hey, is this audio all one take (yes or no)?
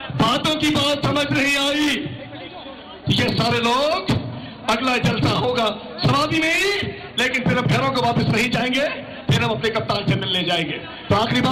yes